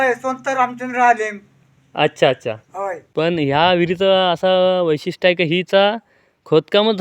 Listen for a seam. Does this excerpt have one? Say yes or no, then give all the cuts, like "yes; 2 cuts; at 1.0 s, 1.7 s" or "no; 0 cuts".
yes; 1 cut; at 3.0 s